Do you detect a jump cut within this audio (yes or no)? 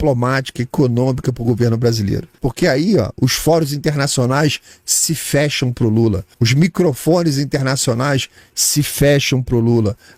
yes